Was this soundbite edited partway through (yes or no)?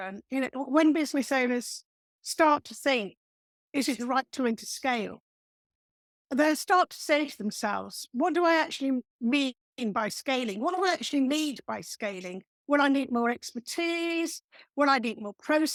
no